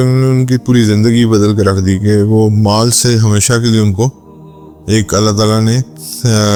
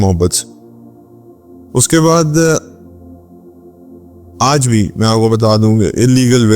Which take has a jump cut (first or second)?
second